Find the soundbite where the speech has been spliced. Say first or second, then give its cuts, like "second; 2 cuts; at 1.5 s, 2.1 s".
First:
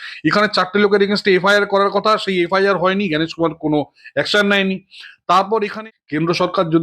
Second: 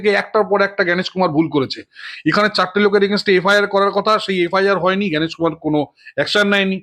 first; 1 cut; at 5.7 s